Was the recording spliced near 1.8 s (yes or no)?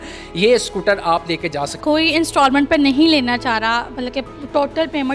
yes